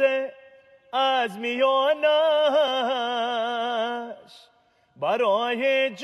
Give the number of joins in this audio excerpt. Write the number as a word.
zero